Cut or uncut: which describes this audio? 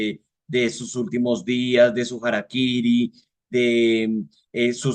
uncut